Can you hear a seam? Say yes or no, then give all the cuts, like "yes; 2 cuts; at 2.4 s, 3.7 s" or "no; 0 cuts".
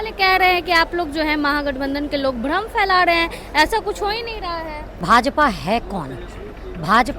yes; 1 cut; at 5.0 s